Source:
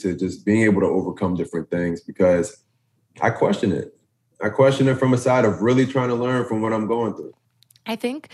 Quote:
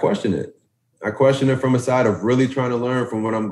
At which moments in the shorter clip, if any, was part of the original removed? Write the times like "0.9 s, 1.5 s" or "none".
none